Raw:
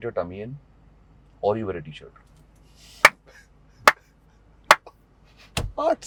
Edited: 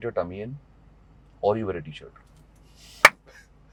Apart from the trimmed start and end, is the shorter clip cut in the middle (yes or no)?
no